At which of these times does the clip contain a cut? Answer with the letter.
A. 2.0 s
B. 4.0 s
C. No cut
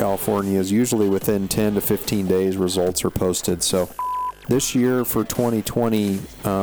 B